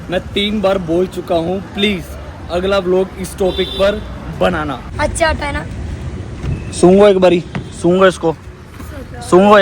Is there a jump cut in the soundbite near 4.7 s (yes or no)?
yes